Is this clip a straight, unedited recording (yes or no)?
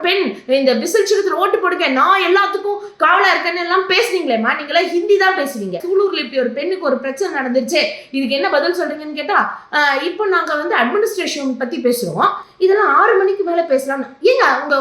no